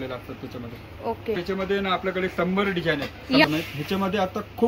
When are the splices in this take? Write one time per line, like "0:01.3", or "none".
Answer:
none